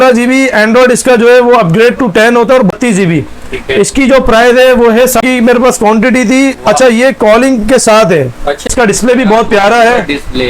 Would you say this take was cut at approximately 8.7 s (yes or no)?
yes